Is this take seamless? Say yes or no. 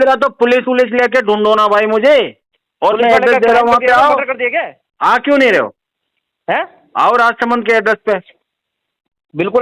yes